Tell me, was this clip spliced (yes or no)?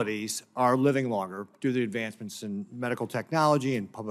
yes